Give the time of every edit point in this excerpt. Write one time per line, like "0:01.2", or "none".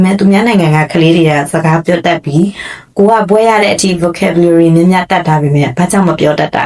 none